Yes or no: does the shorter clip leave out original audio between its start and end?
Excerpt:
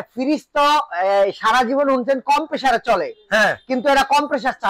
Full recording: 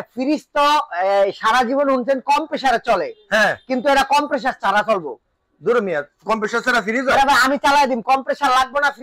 no